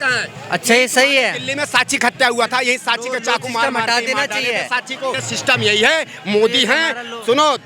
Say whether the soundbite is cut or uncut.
cut